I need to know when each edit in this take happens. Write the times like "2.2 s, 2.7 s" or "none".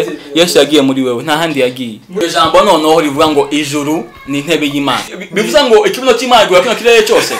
2.1 s, 5.2 s